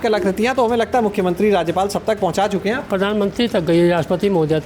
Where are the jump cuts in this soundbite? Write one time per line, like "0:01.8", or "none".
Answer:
none